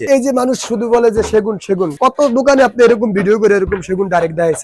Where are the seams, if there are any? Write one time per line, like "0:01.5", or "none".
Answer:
none